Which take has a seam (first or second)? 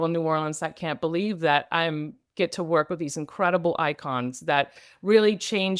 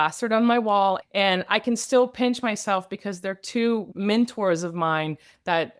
second